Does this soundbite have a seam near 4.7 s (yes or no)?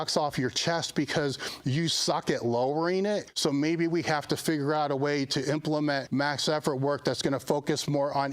no